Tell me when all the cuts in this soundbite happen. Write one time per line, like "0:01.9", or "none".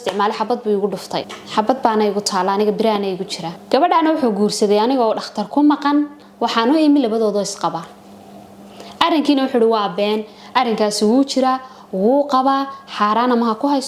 0:01.4
0:03.5